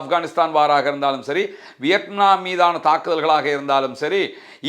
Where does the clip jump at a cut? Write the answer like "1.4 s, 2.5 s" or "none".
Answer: none